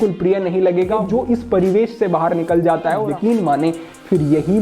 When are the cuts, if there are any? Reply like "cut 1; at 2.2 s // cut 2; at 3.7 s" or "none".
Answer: cut 1; at 1.0 s // cut 2; at 3.1 s